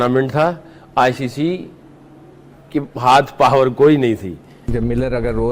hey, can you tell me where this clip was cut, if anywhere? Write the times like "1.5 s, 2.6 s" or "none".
4.6 s